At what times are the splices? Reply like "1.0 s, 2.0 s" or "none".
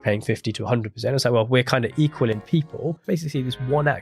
3.0 s